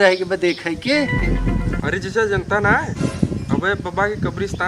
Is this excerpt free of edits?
no; 1 cut; at 1.1 s

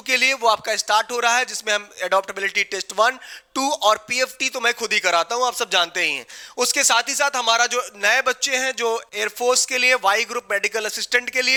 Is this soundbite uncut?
yes; 0 cuts

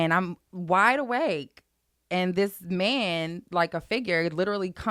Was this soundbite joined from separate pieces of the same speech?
no; 0 cuts

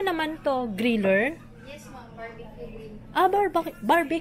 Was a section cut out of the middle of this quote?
no; 0 cuts

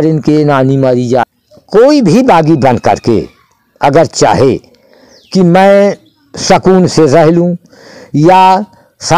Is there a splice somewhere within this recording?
yes; 1 cut; at 1.3 s

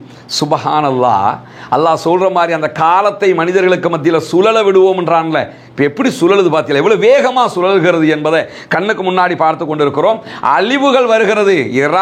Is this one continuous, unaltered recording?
yes; 0 cuts

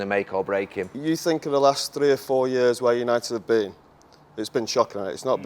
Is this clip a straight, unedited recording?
no; 1 cut; at 0.9 s

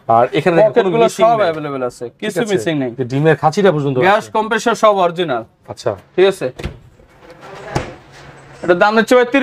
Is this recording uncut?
yes; 0 cuts

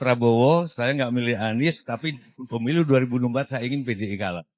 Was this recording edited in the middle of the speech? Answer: no; 0 cuts

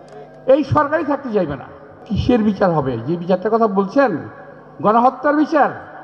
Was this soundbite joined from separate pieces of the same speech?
yes; 1 cut; at 2.0 s

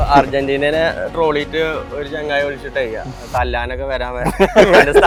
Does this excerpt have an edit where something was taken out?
no; 0 cuts

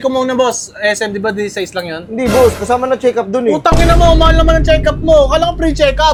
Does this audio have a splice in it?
no; 0 cuts

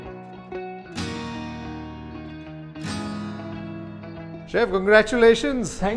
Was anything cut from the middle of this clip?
yes; 1 cut; at 4.4 s

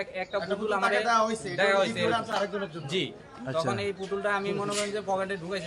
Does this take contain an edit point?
no; 0 cuts

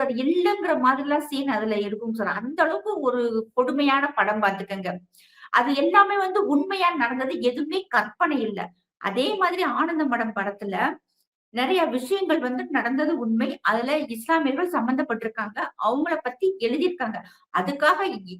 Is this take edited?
no; 0 cuts

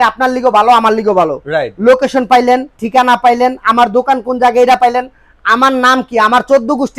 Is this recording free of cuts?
yes; 0 cuts

